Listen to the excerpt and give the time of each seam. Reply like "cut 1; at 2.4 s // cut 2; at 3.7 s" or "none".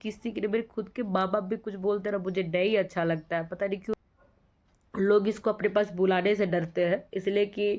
cut 1; at 3.9 s